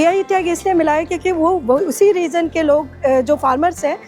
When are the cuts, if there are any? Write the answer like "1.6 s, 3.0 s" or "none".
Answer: none